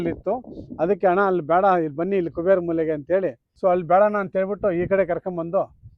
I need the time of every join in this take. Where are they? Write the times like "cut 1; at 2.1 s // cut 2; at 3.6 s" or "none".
cut 1; at 3.4 s